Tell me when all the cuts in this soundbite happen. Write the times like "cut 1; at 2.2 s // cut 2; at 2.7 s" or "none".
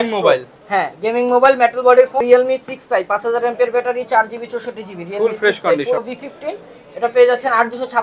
cut 1; at 2.2 s // cut 2; at 6.0 s

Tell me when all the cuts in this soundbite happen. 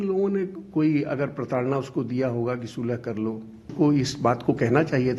cut 1; at 3.7 s

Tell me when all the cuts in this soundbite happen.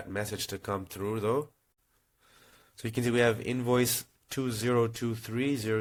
none

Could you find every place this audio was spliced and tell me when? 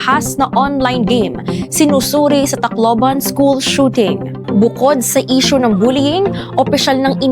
none

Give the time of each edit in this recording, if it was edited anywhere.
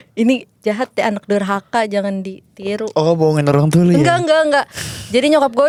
none

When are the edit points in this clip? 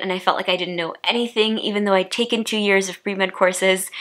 none

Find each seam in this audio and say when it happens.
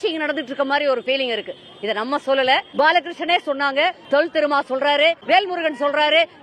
cut 1; at 2.7 s // cut 2; at 4.0 s // cut 3; at 5.2 s

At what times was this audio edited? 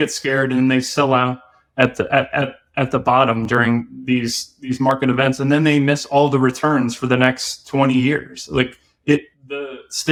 none

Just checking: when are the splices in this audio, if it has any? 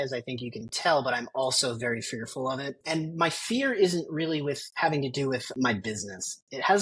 cut 1; at 2.8 s // cut 2; at 5.5 s

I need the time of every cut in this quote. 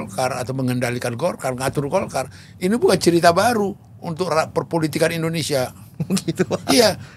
none

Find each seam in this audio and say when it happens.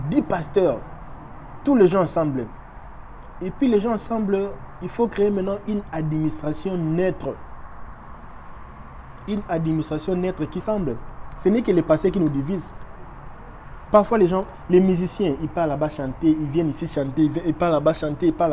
cut 1; at 10.6 s

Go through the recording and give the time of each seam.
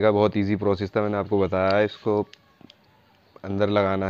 none

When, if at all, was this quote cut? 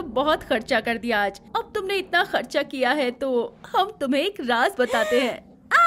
none

